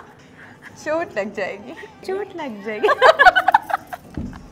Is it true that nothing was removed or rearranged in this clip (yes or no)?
no